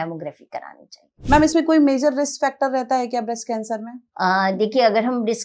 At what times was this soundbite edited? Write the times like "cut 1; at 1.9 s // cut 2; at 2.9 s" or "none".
cut 1; at 1.1 s // cut 2; at 4.0 s